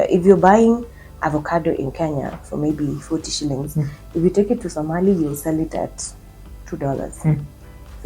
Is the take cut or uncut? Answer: cut